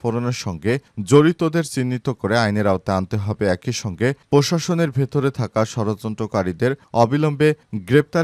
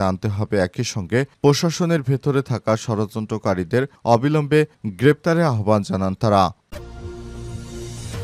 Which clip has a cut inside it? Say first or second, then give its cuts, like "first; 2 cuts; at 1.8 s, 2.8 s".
second; 1 cut; at 6.6 s